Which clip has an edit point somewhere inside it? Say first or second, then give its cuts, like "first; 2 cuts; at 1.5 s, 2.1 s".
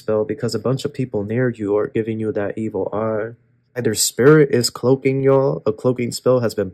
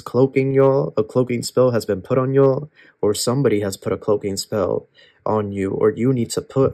first; 1 cut; at 3.8 s